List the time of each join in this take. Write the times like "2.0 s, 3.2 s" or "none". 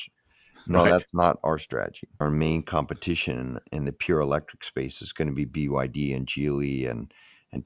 2.2 s